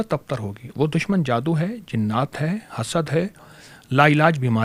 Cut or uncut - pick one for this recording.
uncut